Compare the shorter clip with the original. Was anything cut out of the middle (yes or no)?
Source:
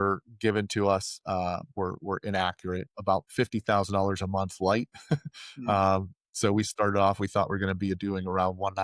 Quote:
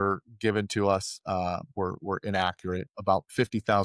no